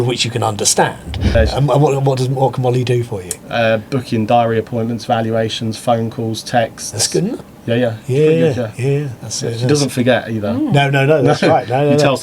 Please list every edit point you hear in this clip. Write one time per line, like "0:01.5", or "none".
0:01.3